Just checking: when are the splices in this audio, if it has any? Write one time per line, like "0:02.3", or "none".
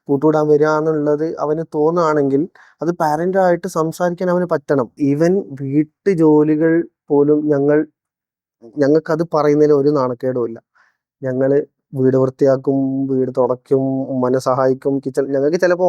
0:04.9